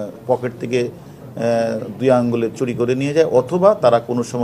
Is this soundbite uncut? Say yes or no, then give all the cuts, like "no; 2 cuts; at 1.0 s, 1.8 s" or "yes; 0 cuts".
yes; 0 cuts